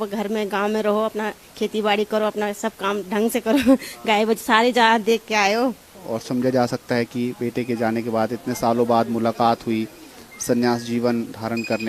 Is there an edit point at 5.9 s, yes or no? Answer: yes